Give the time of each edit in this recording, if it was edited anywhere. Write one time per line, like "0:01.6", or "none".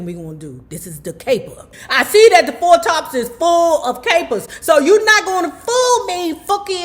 0:01.7

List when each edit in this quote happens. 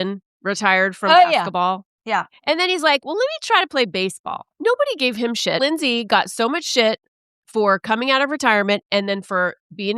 0:04.5
0:05.6

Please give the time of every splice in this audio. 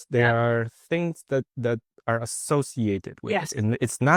none

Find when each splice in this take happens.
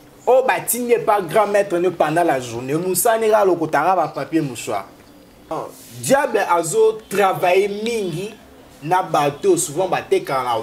0:05.5

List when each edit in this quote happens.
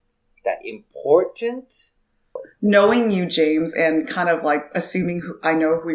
0:02.5

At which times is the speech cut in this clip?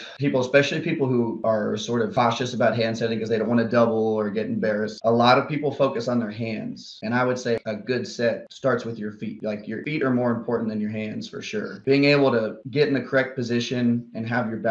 0:04.9
0:06.9
0:07.6
0:09.8
0:11.8

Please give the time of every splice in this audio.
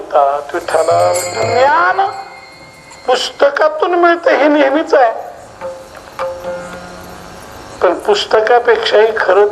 0:01.3

